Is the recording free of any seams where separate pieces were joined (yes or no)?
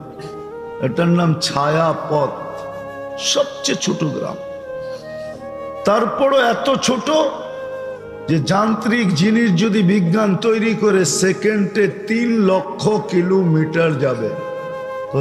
yes